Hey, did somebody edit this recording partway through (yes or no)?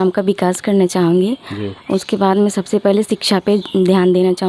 no